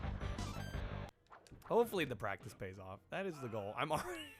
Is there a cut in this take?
yes; 1 cut; at 1.1 s

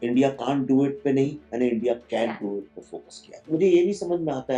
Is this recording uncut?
no; 1 cut; at 3.4 s

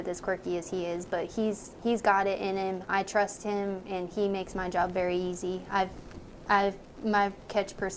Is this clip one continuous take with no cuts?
yes; 0 cuts

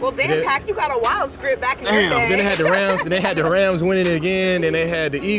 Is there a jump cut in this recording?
no; 0 cuts

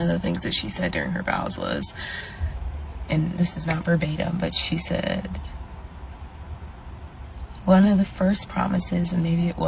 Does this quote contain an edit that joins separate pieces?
no; 0 cuts

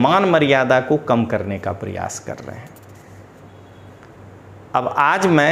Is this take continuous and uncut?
yes; 0 cuts

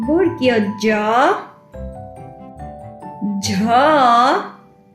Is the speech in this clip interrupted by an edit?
yes; 2 cuts; at 1.6 s, 3.2 s

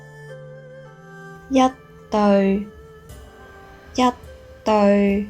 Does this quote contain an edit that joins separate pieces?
yes; 1 cut; at 1.4 s

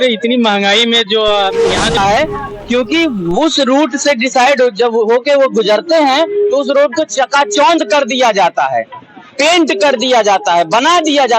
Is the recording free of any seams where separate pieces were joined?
no; 1 cut; at 2.0 s

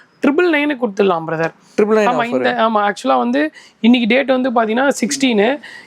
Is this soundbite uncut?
yes; 0 cuts

